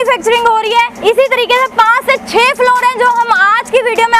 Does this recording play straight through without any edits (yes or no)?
yes